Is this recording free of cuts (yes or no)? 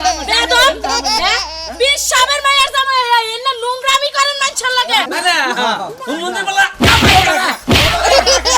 no